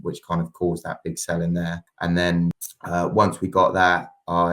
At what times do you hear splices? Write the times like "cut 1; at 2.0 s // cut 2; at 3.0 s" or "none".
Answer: cut 1; at 1.9 s // cut 2; at 2.7 s